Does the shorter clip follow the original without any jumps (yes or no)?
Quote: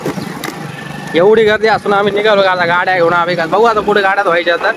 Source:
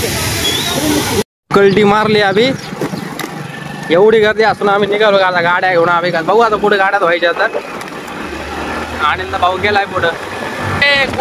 yes